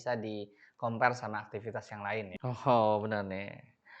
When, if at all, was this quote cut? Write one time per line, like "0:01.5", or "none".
0:02.3